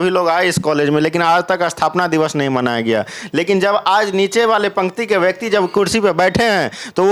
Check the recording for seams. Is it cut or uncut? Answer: uncut